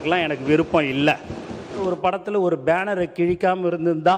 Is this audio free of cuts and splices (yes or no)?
no